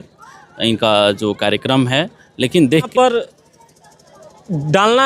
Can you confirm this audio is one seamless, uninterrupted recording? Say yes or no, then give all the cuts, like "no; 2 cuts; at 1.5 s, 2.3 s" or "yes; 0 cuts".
no; 1 cut; at 2.9 s